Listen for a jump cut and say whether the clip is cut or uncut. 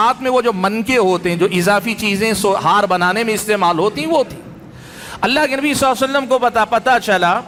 uncut